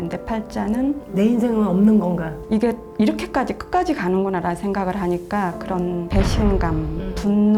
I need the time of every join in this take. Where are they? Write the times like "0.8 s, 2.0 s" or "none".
2.4 s